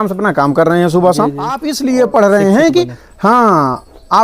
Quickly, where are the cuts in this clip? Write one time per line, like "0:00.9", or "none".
0:01.7